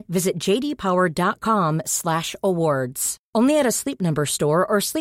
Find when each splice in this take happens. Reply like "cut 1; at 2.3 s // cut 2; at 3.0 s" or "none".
none